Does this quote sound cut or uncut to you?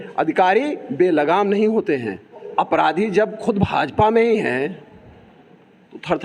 cut